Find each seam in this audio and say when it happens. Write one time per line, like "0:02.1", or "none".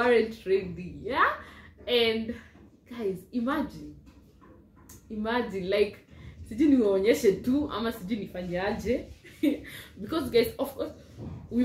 none